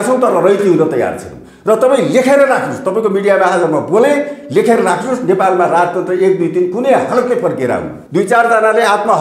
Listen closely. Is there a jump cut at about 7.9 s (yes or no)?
yes